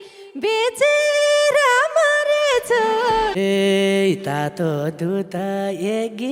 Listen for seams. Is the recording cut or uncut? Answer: cut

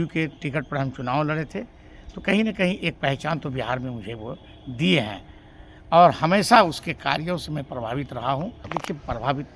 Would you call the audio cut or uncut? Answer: cut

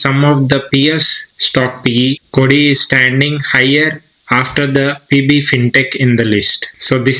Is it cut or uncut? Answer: uncut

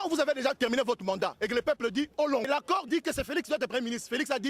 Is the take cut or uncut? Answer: cut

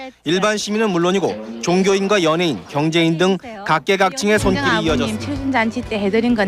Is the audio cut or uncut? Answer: cut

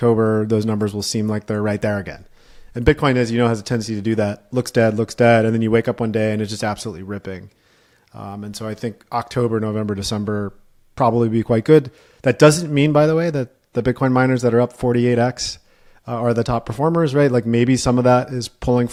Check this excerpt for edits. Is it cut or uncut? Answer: uncut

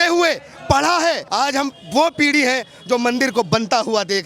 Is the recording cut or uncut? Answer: cut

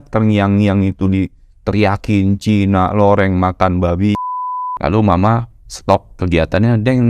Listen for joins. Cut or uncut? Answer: cut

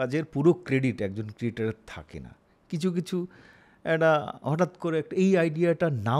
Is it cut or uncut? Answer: uncut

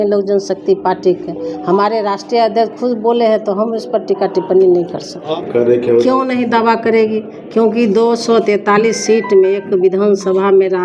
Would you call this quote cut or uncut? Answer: cut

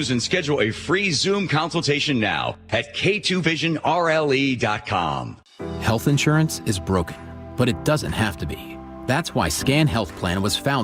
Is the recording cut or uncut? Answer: cut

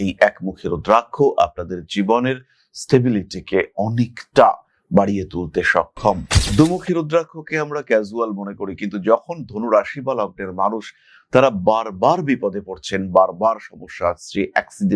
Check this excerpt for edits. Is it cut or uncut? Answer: cut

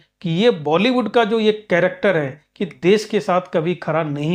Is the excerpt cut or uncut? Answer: uncut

